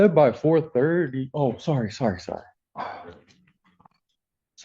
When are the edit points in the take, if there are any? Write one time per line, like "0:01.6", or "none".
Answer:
none